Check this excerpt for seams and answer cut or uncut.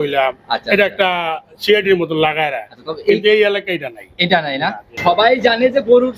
cut